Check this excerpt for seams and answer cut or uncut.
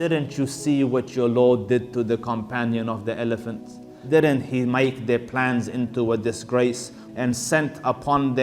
cut